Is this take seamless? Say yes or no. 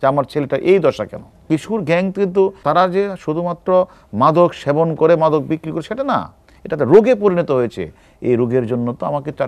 no